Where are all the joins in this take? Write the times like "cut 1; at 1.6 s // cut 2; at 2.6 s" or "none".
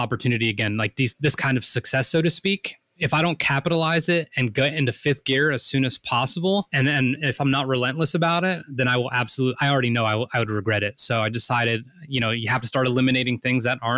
cut 1; at 3.0 s // cut 2; at 6.7 s